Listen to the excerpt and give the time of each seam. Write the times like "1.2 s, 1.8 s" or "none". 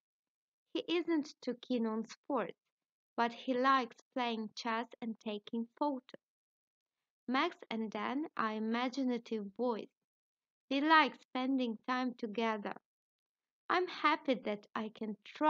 14.4 s